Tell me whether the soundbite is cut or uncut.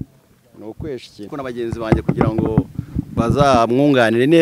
cut